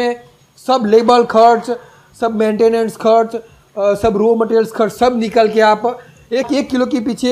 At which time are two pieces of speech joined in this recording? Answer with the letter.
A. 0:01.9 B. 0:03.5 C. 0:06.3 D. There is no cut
C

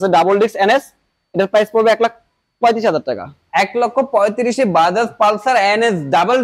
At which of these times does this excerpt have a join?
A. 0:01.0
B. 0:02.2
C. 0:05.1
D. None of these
D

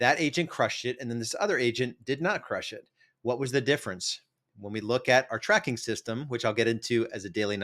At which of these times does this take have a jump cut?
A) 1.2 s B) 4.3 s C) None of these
C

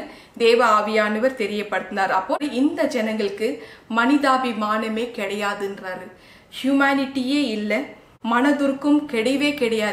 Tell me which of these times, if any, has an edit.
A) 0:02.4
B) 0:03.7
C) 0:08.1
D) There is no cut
A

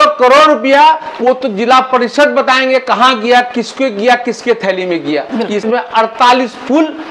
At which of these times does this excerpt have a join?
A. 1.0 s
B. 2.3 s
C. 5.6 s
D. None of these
C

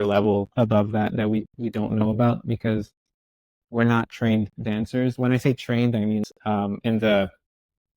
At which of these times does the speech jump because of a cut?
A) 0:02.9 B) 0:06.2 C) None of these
B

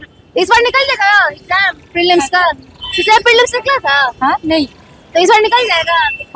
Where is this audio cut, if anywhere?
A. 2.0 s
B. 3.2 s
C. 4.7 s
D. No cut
D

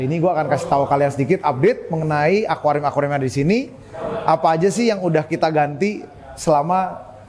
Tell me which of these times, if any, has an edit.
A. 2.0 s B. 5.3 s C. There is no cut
C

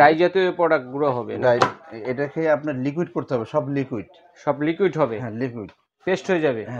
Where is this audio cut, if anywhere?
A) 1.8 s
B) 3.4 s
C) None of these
C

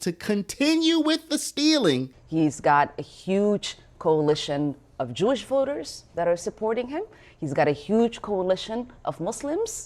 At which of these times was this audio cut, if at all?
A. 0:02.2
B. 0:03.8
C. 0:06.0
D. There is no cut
A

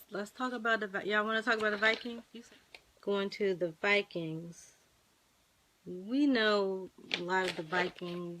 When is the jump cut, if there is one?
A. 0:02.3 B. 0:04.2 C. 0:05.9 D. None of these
A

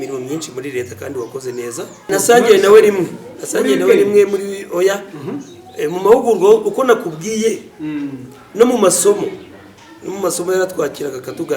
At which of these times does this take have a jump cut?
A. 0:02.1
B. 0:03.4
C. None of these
A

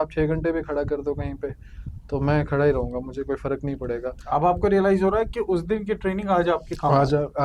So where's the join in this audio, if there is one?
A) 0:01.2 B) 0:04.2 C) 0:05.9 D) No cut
D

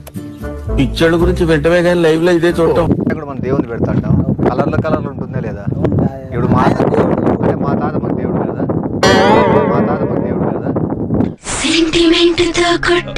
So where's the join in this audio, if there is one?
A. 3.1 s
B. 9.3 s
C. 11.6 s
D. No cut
A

